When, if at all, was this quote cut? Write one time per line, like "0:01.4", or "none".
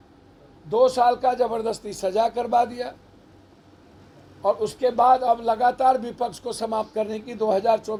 none